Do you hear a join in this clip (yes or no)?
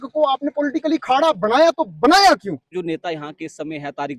yes